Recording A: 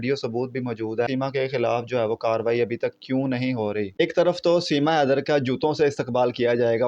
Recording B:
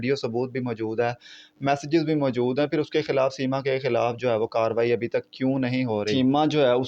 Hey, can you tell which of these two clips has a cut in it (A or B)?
A